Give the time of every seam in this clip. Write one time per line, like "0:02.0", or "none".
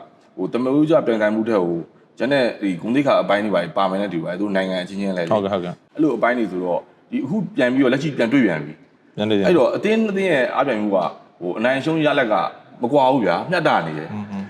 0:05.8